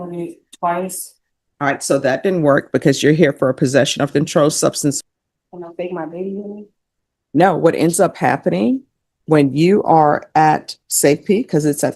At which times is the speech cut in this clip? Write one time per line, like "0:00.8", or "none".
0:05.0